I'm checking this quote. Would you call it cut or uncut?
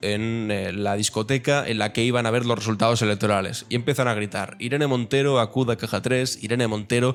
uncut